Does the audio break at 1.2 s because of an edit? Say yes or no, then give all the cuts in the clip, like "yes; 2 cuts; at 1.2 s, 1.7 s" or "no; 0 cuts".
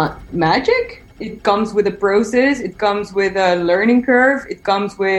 yes; 1 cut; at 1.2 s